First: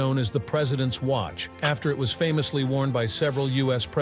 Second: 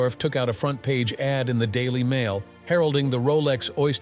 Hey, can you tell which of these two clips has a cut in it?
first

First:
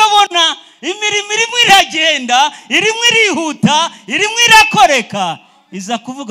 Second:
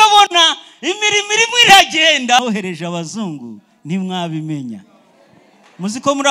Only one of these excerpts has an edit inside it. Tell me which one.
second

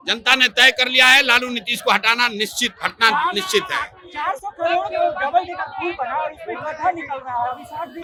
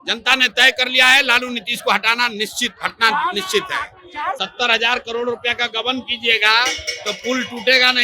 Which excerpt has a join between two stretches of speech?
second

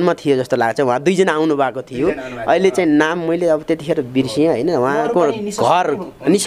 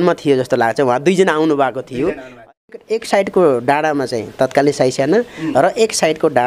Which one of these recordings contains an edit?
second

